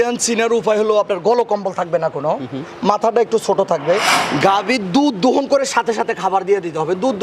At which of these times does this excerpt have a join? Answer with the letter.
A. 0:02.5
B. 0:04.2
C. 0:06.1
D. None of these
B